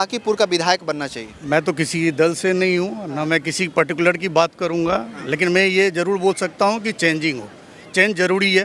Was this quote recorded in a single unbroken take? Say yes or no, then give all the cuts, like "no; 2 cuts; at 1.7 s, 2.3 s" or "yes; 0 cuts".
yes; 0 cuts